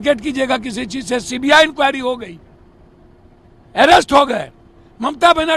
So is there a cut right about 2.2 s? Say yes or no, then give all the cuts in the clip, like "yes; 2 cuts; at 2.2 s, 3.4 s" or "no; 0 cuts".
no; 0 cuts